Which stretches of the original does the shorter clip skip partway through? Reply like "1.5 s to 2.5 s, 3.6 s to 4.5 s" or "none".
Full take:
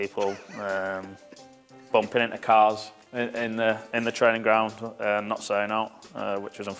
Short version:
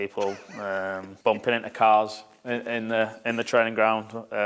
1.1 s to 1.8 s